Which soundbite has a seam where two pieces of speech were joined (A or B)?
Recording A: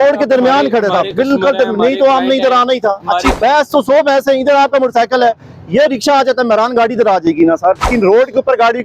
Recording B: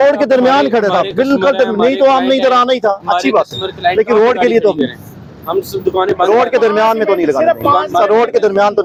A